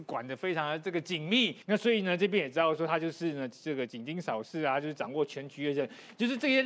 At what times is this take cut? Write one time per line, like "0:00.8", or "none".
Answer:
0:01.6